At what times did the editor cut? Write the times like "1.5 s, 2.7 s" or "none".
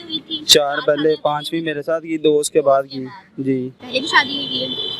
3.8 s